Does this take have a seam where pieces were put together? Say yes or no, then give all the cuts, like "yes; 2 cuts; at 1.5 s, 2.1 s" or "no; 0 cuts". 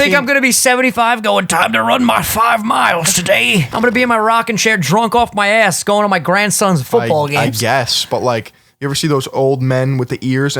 yes; 2 cuts; at 3.7 s, 9.3 s